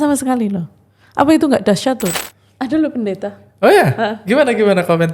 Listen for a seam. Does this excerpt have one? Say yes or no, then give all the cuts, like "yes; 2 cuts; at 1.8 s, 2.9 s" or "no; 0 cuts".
yes; 1 cut; at 2.1 s